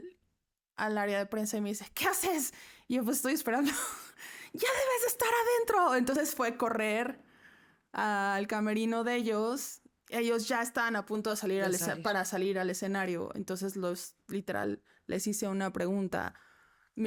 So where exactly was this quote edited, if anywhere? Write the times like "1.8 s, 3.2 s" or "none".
none

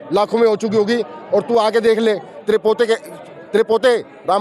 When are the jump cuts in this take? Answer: 2.3 s

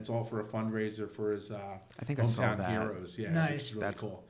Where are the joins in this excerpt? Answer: none

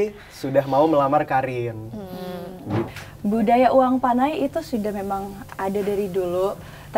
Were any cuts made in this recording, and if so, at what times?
2.9 s

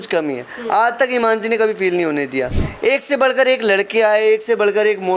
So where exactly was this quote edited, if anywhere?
2.6 s

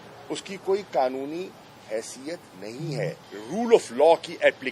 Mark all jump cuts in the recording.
3.3 s

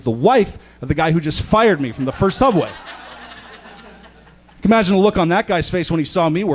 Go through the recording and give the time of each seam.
none

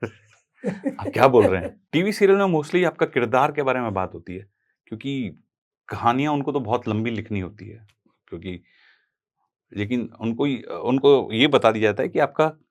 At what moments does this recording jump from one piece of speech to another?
1.8 s

